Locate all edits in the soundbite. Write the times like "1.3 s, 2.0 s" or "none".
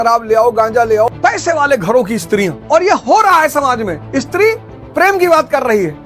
1.1 s, 2.6 s, 4.0 s

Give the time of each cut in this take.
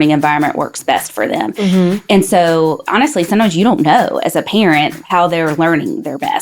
2.8 s, 5.0 s

